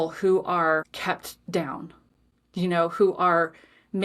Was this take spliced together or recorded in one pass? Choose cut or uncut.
cut